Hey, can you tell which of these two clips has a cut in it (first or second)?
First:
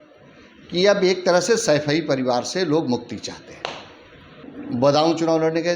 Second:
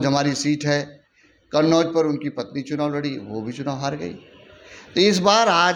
first